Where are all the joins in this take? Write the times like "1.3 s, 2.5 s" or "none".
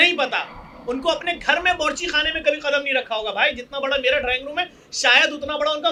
none

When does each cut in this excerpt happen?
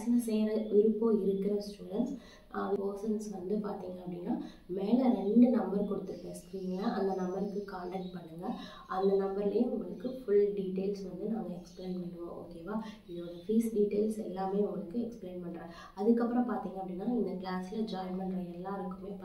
2.8 s

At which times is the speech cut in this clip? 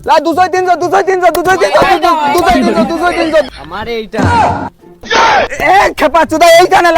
3.5 s

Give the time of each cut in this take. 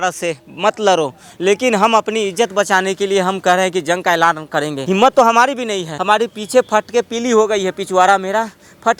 4.8 s, 5.9 s

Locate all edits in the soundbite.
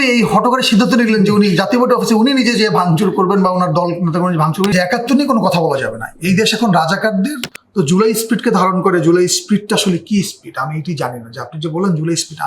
4.7 s, 7.5 s

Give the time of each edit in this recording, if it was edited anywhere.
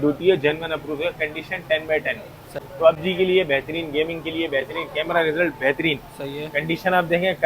2.6 s

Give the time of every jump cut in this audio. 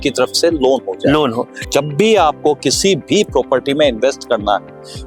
1.6 s

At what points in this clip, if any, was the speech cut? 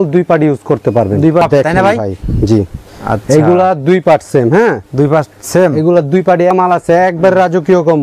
1.4 s, 6.5 s

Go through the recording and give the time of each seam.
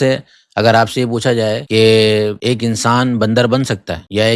none

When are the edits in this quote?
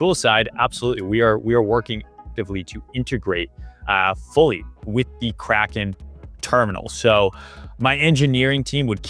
none

